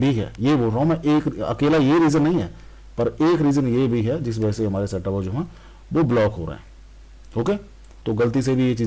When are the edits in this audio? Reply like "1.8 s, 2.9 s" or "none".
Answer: 7.9 s